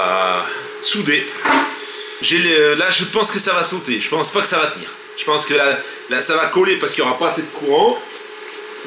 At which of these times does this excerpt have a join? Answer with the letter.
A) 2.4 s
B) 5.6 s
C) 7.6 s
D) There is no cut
D